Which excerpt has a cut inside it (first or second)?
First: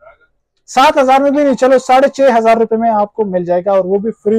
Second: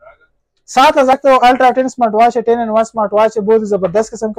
second